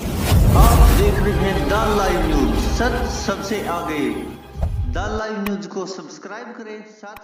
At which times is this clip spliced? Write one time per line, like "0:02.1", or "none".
none

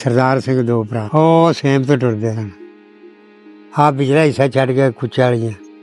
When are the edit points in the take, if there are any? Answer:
0:01.0

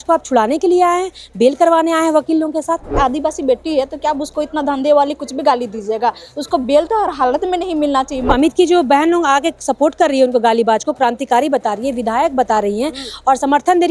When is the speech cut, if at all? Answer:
0:02.9
0:08.3

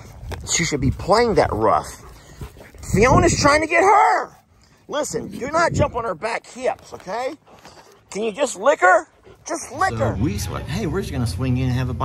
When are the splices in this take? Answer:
0:10.0

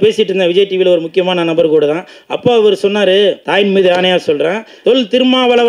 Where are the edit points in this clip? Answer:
0:03.4
0:04.7

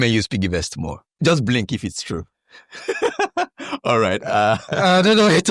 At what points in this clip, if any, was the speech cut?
0:01.0

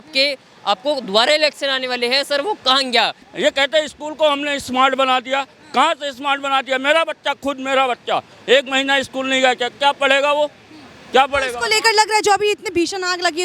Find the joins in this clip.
0:03.3

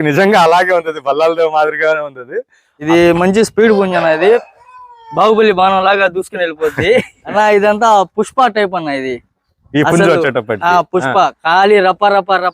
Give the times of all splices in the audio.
0:02.7
0:07.2

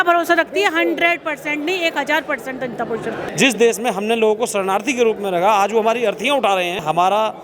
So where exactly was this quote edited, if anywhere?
0:03.3

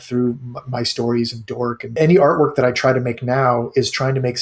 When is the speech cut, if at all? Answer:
0:02.0

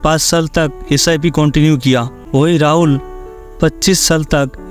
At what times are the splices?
0:02.2

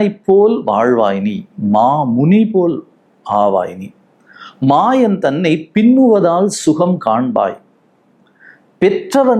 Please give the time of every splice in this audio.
none

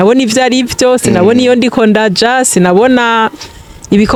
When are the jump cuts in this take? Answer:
none

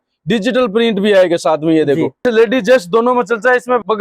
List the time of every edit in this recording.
0:02.2

